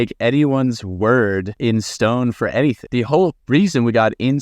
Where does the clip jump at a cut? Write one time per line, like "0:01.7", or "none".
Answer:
0:01.5
0:03.1